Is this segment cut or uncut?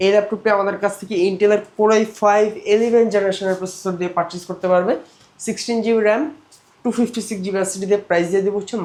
uncut